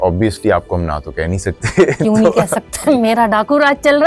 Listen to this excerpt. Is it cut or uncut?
uncut